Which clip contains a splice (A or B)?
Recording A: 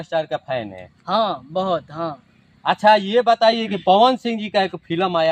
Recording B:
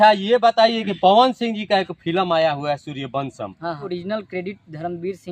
B